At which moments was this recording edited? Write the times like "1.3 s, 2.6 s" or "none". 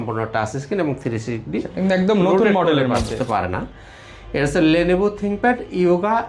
3.2 s